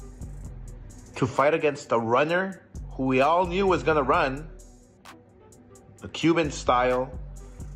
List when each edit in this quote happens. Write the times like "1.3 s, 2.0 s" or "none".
1.0 s